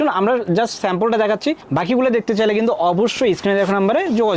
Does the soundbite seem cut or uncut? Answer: uncut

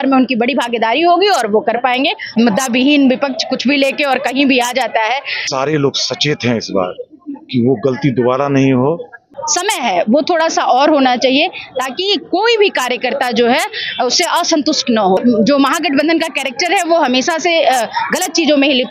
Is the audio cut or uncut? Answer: cut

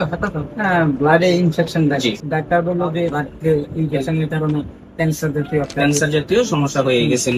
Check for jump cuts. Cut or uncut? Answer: cut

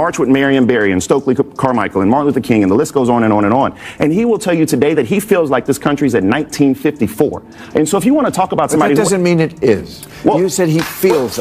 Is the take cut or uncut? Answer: uncut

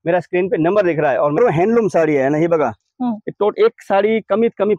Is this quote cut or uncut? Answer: cut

